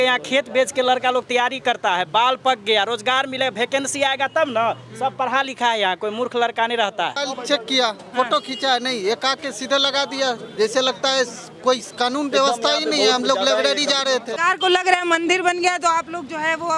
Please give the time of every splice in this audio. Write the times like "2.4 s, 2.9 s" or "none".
7.2 s, 14.3 s